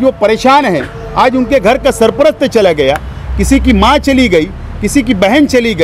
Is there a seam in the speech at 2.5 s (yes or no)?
no